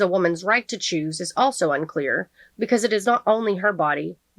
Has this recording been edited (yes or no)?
no